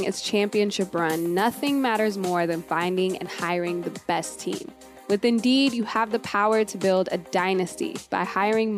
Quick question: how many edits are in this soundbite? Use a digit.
0